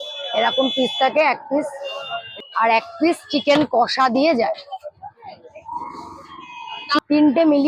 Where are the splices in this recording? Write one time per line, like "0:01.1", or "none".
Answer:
0:02.2
0:07.0